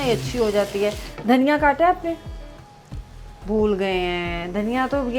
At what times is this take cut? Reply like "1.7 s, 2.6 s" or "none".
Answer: 1.1 s